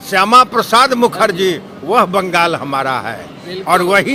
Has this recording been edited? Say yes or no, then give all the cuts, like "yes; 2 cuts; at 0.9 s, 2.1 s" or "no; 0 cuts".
no; 0 cuts